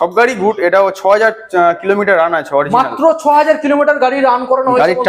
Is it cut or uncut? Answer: uncut